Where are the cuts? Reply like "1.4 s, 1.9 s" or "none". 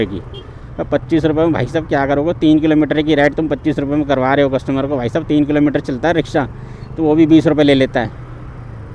none